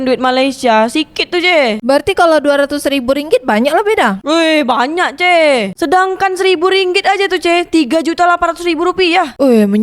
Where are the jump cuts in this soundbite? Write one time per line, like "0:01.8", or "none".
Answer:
none

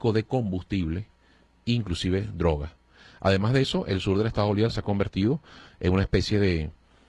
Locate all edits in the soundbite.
0:03.9

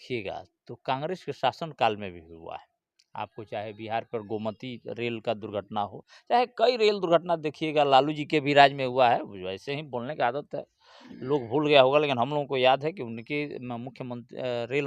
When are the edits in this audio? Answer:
none

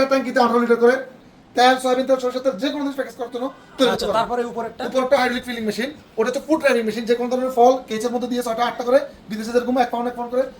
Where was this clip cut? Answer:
0:01.2

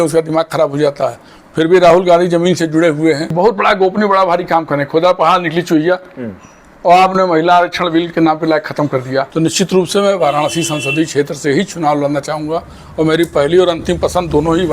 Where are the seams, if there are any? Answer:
0:03.3
0:09.3

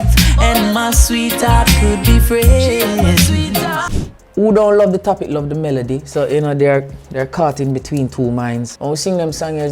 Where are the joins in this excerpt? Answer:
0:03.9
0:08.7

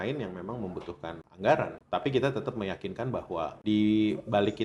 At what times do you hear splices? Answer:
0:01.2
0:01.8
0:03.6

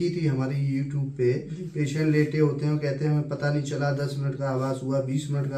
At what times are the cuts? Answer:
none

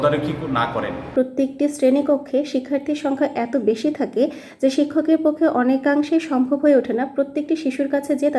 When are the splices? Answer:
0:01.1

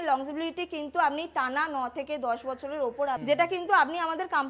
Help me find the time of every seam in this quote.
0:03.2

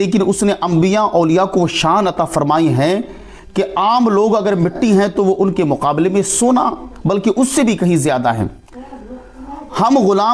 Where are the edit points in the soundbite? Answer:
none

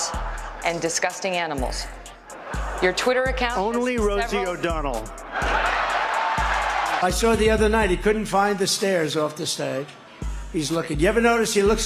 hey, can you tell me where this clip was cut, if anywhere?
0:07.0

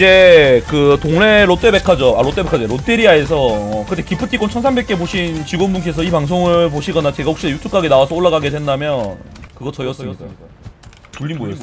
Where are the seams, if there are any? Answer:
0:09.4

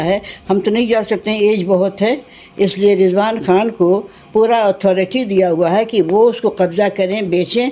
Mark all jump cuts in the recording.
none

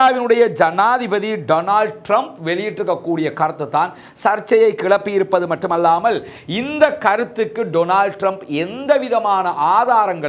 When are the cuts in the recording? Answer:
none

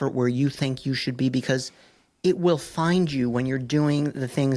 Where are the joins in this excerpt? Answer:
none

